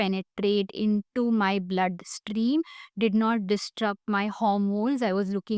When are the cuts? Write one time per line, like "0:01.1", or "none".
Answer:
none